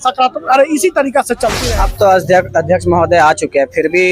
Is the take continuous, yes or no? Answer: no